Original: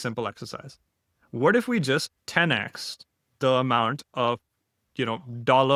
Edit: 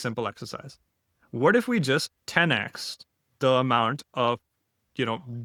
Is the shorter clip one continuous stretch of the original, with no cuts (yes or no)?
yes